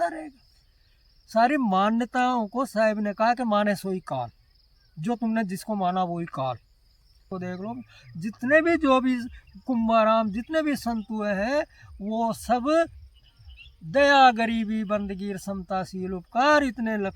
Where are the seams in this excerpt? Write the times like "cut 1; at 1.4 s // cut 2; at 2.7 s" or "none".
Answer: cut 1; at 7.3 s